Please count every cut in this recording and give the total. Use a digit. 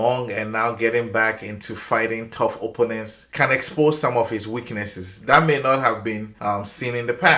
2